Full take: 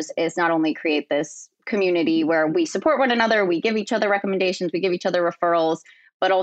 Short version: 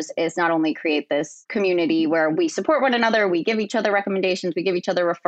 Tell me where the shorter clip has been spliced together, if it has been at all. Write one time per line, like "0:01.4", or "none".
0:01.4